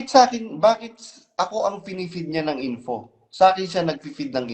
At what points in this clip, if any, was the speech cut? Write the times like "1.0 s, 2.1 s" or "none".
none